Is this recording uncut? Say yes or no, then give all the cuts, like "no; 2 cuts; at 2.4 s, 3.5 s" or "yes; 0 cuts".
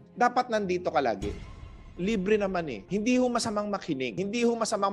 no; 3 cuts; at 1.5 s, 2.8 s, 4.1 s